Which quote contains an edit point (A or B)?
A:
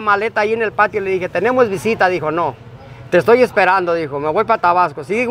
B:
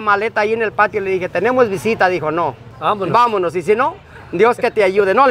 B